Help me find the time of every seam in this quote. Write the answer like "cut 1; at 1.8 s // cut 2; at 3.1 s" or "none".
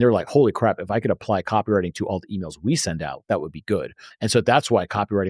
cut 1; at 4.0 s